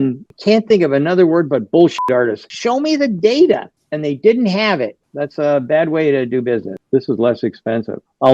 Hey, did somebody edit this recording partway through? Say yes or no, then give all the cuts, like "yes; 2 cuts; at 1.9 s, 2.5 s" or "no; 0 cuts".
yes; 3 cuts; at 2.5 s, 5.0 s, 6.8 s